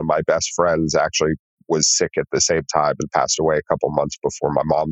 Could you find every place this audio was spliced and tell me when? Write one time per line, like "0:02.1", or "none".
0:01.5